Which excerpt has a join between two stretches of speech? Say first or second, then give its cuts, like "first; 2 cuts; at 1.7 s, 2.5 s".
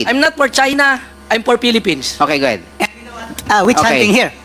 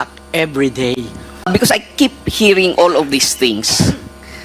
second; 1 cut; at 1.4 s